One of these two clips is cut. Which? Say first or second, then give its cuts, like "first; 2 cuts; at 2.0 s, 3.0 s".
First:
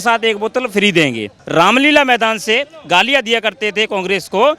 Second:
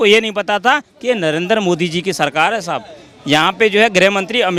first; 1 cut; at 1.3 s